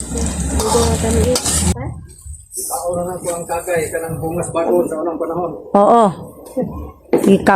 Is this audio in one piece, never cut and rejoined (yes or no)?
no